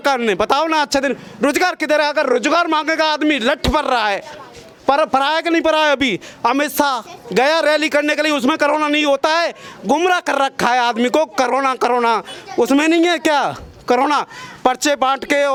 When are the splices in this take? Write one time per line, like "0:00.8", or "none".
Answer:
none